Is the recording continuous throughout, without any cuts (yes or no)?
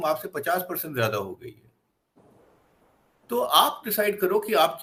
yes